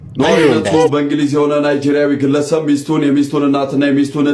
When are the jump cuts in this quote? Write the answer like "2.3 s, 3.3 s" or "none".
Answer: 0.9 s